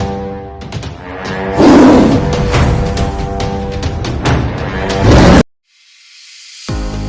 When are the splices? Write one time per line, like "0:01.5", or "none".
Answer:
0:05.4